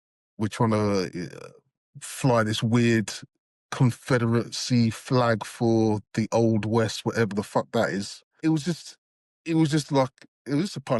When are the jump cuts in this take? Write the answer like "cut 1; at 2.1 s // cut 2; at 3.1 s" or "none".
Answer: cut 1; at 8.4 s